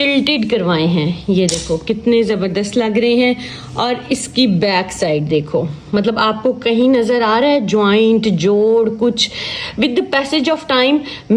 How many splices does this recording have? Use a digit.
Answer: 0